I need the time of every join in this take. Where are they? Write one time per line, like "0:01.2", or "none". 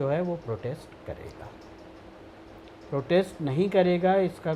none